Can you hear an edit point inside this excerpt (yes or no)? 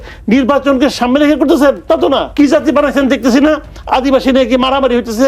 yes